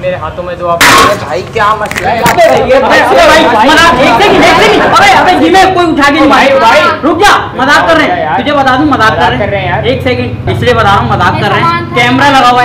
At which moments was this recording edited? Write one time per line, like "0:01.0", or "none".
none